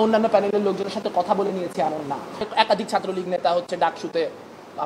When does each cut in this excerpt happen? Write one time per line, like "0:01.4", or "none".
0:02.5